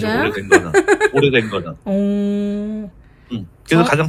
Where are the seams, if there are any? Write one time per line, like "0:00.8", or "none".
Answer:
none